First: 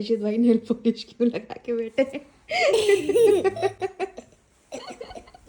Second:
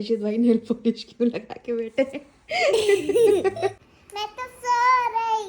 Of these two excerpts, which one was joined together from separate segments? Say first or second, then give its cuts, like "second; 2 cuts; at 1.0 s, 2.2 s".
second; 1 cut; at 3.8 s